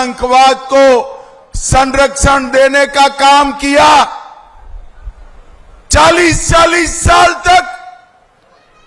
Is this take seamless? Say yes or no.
yes